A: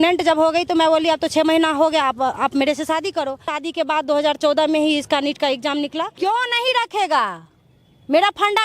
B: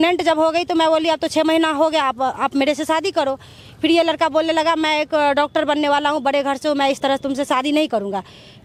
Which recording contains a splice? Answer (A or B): A